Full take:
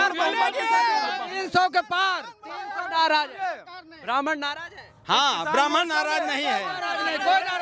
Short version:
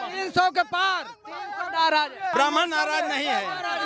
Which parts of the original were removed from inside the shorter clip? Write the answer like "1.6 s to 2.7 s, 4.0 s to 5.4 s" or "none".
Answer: 3.5 s to 5.5 s